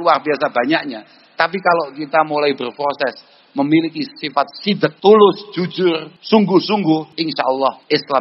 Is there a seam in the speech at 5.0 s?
yes; 3 cuts; at 5.0 s, 6.1 s, 7.4 s

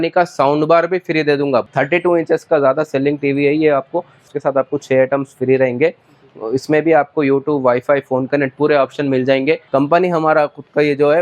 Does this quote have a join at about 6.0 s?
no; 3 cuts; at 1.6 s, 4.3 s, 9.6 s

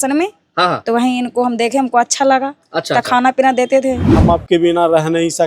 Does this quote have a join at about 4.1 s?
yes; 1 cut; at 4.1 s

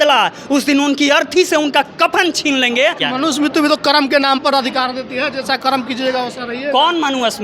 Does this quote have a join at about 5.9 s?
no; 1 cut; at 3.0 s

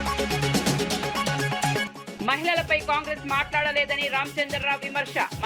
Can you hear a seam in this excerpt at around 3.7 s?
no; 1 cut; at 1.8 s

